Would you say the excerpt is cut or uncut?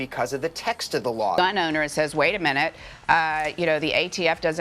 cut